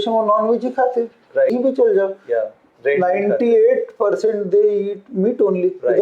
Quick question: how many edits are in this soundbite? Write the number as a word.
one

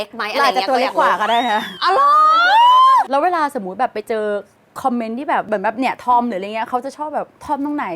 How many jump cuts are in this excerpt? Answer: two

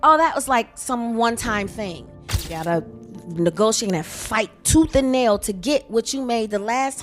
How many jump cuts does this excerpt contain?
one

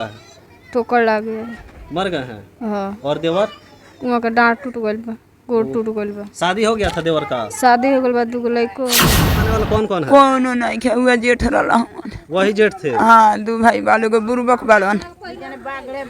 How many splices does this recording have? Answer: one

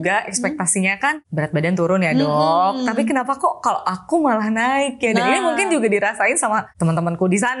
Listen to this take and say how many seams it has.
two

